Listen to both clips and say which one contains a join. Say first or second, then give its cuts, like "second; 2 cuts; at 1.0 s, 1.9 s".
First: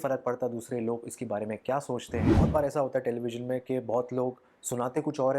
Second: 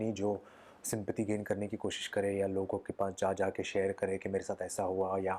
first; 1 cut; at 2.3 s